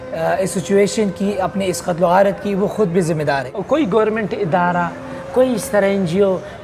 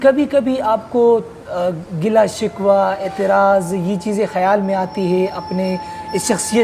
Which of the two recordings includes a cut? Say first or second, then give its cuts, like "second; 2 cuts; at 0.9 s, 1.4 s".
first; 1 cut; at 3.5 s